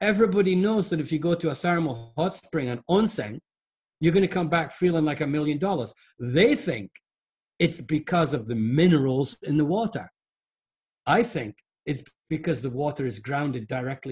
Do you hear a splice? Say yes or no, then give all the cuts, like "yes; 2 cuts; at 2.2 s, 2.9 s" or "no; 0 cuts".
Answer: no; 0 cuts